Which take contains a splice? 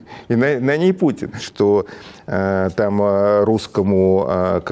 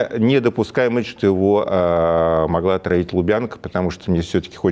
first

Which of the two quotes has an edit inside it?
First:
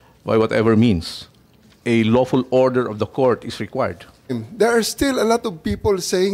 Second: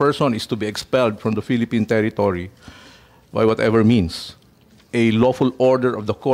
first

